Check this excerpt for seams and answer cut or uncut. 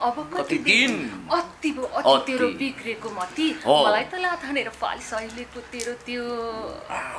uncut